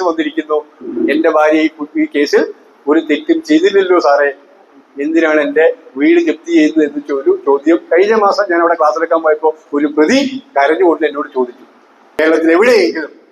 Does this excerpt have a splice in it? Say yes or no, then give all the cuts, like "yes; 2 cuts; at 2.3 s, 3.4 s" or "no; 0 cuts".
yes; 1 cut; at 12.0 s